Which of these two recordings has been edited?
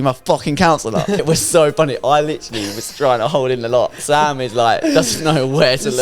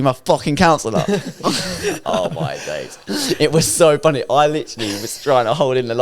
first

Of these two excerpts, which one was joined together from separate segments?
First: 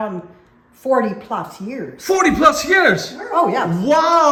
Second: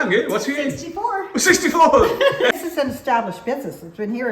second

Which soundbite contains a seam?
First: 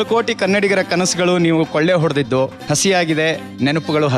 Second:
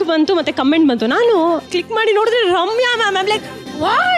second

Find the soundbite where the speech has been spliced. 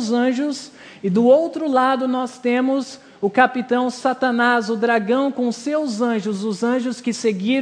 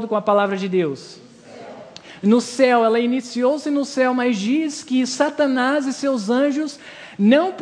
first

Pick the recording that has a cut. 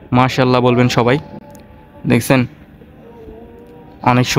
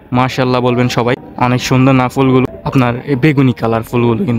second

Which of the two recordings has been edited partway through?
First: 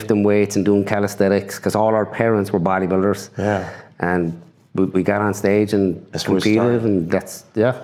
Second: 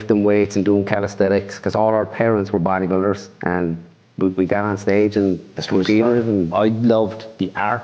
second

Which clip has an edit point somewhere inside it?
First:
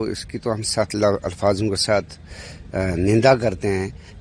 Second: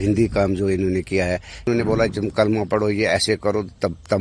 second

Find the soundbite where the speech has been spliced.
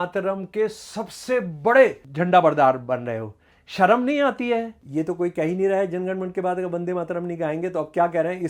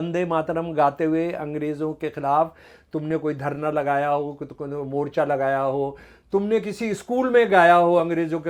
first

